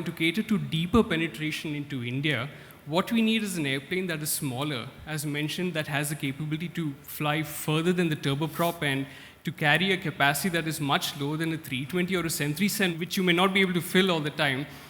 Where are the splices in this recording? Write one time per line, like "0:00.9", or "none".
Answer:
0:07.0
0:12.9